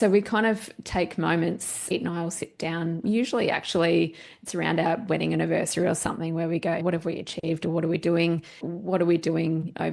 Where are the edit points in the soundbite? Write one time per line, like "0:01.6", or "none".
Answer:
0:01.8
0:06.8
0:08.7